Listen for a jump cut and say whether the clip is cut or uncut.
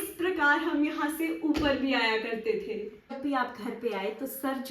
cut